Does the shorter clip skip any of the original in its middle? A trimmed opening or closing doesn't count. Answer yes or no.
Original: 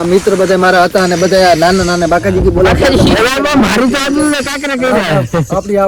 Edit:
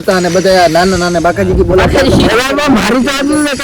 no